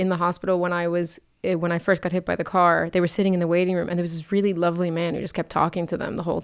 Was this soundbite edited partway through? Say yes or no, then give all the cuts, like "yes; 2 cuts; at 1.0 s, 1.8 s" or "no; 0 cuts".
no; 0 cuts